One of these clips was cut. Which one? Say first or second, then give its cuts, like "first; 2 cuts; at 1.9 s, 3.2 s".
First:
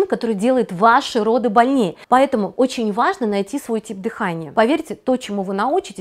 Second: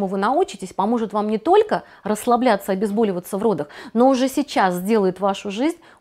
first; 2 cuts; at 2.0 s, 4.4 s